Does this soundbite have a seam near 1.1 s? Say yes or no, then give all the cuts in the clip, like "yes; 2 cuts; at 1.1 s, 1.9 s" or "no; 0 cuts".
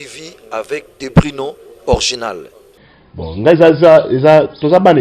no; 1 cut; at 2.9 s